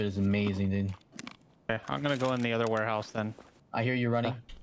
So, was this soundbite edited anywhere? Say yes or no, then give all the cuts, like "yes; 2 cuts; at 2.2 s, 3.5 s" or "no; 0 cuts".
yes; 1 cut; at 3.6 s